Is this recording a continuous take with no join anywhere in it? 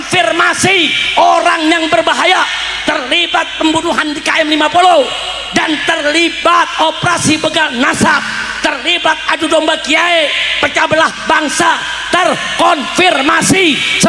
yes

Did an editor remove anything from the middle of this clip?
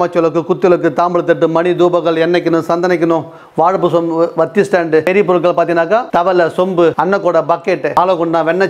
yes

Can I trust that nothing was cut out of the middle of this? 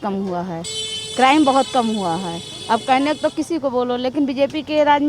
yes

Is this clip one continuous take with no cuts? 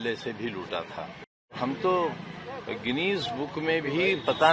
no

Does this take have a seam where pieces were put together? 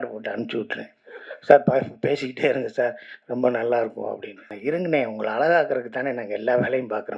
yes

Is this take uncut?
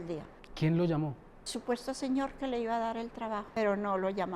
no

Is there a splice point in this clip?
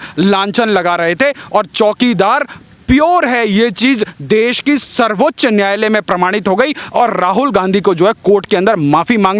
no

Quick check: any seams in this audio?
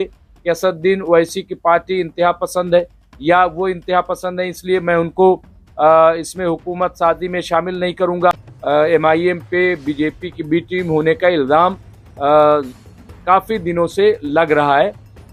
yes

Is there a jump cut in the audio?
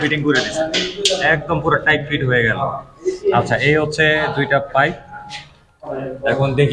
no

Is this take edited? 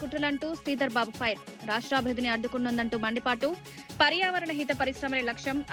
no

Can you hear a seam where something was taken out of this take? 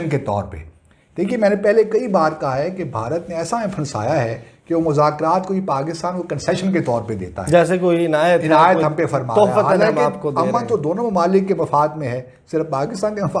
no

